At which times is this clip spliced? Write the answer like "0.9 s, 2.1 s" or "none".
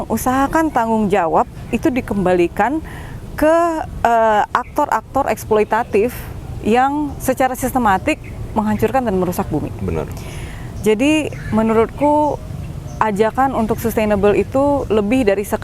none

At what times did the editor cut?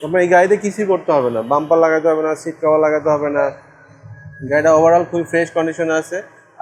none

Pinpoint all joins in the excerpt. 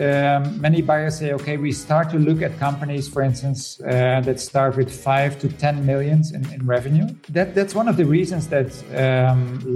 7.2 s

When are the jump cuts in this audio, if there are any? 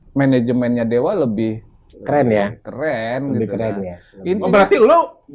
none

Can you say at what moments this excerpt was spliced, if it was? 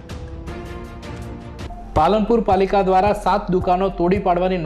1.7 s

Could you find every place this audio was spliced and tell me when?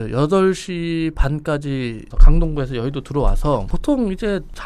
2.2 s, 3.7 s

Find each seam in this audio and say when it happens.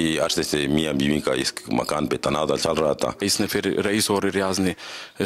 3.2 s

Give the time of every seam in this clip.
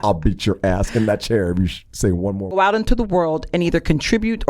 2.4 s

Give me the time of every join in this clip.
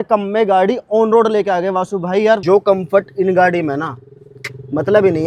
2.4 s

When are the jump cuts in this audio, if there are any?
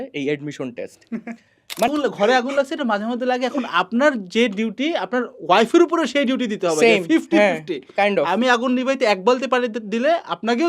1.9 s

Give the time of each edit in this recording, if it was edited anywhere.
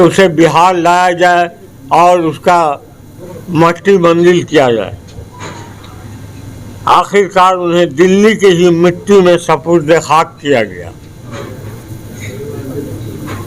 none

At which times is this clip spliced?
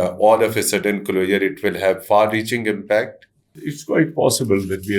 3.7 s

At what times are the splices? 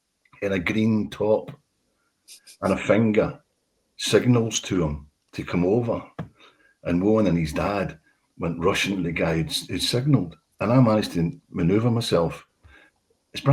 none

